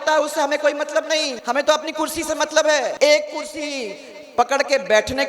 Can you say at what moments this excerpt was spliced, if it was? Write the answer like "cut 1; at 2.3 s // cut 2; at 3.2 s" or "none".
cut 1; at 1.3 s // cut 2; at 2.9 s